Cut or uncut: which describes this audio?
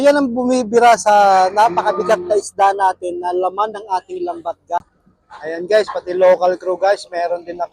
cut